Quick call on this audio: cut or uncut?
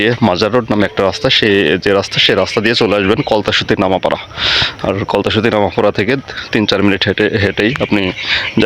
uncut